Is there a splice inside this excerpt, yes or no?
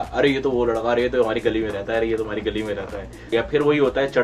yes